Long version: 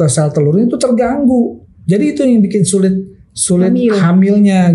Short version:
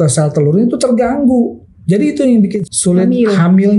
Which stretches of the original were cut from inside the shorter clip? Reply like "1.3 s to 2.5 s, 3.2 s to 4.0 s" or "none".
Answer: 2.6 s to 3.2 s